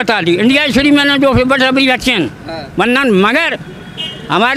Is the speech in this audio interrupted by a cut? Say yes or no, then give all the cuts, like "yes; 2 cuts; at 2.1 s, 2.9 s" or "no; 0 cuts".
no; 0 cuts